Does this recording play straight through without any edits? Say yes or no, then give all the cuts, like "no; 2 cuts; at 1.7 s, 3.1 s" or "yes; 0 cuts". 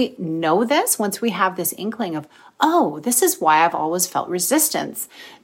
yes; 0 cuts